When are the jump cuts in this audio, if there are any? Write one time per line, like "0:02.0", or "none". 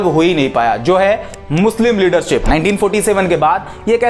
0:02.4